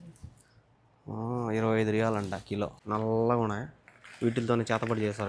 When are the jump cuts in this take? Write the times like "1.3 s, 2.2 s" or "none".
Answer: 2.8 s